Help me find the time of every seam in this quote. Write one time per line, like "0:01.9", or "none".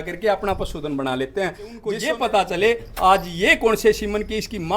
0:02.0

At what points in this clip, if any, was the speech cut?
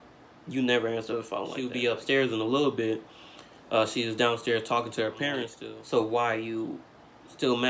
0:01.6
0:05.6

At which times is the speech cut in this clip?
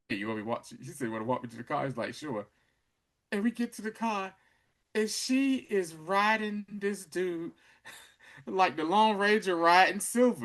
none

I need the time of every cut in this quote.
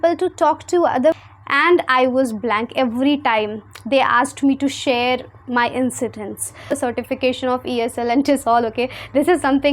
0:01.2
0:06.7

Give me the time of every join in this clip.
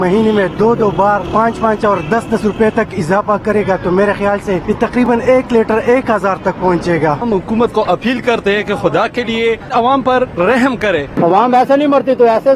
0:01.3
0:05.1
0:07.2
0:09.7
0:11.1

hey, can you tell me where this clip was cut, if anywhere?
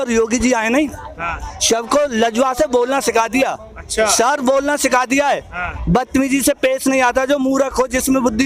none

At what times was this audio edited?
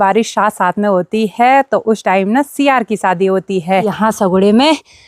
0:03.9

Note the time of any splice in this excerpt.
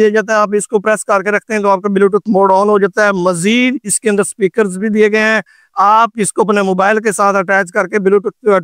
none

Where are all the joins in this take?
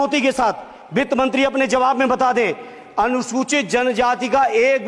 none

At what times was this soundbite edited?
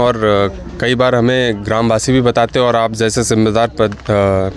none

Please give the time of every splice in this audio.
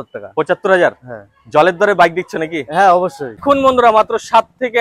0:03.4

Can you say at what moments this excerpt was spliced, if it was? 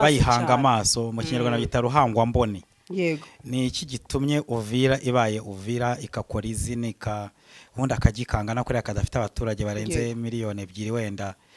none

